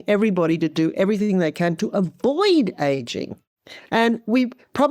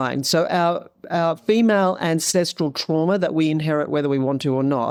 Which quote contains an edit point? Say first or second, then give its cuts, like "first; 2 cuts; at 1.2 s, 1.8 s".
first; 1 cut; at 3.7 s